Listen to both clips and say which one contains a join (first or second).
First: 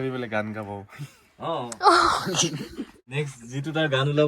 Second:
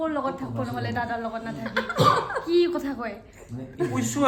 first